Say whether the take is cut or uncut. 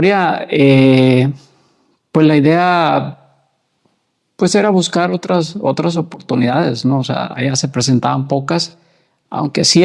uncut